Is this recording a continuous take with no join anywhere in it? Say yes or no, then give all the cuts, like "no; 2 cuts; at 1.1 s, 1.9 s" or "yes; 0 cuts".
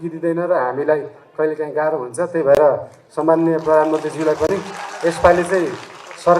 yes; 0 cuts